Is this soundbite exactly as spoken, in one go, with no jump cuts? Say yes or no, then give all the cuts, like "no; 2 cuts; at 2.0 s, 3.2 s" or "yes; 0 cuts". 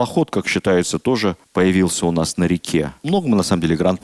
no; 2 cuts; at 1.4 s, 3.0 s